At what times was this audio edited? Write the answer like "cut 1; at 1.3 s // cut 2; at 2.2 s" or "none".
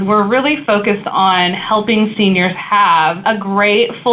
cut 1; at 3.2 s

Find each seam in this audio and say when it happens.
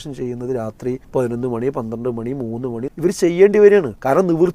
cut 1; at 1.0 s // cut 2; at 2.9 s // cut 3; at 3.7 s

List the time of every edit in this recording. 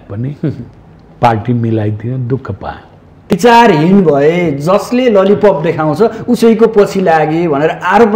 cut 1; at 3.3 s

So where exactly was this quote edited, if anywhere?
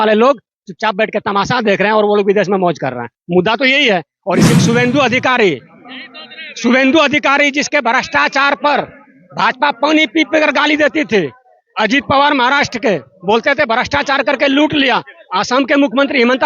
cut 1; at 4.6 s

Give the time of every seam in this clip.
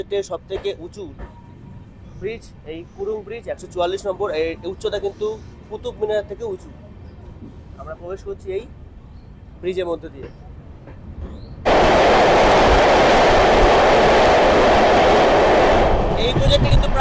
cut 1; at 11.6 s

